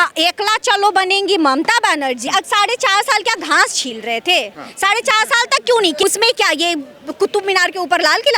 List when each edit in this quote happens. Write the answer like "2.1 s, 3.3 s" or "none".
2.2 s, 6.0 s